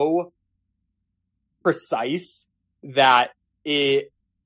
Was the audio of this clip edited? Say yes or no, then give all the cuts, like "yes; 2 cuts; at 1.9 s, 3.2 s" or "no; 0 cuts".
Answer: no; 0 cuts